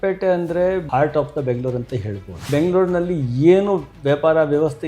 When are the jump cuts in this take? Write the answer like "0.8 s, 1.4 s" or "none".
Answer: 0.8 s, 2.5 s